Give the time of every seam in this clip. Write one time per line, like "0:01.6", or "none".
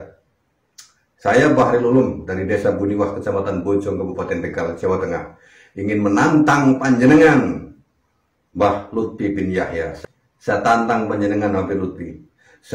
0:09.9